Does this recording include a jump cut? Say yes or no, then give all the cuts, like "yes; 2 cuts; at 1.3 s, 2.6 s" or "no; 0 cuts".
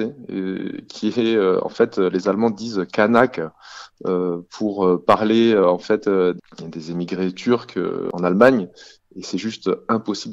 yes; 2 cuts; at 6.4 s, 8.1 s